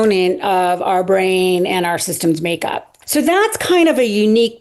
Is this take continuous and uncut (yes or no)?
no